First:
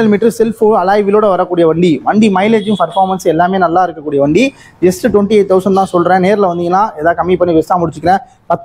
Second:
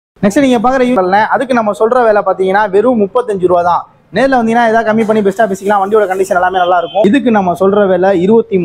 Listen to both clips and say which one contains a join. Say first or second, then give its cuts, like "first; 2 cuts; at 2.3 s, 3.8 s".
second; 2 cuts; at 1.0 s, 7.0 s